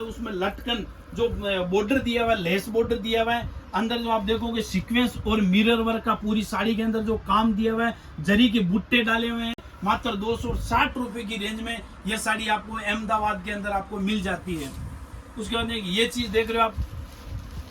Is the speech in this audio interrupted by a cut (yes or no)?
no